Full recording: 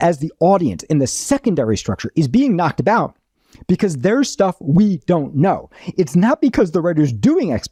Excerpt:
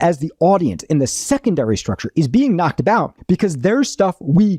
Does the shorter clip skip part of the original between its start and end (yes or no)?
yes